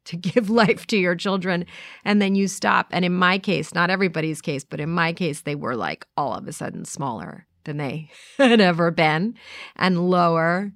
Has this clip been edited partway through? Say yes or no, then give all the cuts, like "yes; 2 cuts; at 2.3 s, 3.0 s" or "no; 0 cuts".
no; 0 cuts